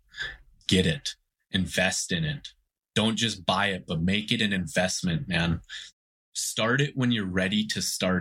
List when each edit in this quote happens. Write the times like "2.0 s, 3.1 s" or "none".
5.8 s